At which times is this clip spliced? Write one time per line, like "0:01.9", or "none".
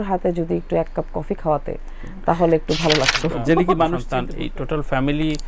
0:04.0